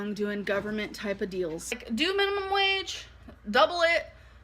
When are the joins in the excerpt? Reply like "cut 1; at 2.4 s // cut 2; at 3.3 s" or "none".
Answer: cut 1; at 2.0 s